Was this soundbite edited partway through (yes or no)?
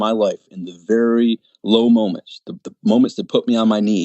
no